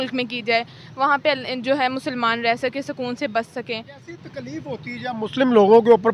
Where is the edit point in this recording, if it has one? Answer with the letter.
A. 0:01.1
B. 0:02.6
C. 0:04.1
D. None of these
C